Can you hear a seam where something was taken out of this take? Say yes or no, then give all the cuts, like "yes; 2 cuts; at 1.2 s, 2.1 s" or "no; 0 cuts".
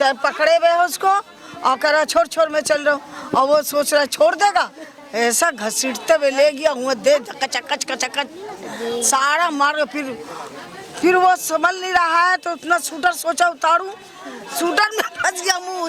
no; 0 cuts